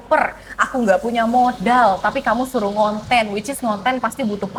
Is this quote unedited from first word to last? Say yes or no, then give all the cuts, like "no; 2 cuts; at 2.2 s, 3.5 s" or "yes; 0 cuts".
yes; 0 cuts